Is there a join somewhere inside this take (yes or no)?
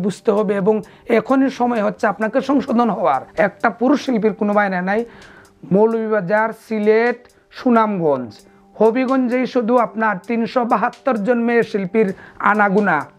yes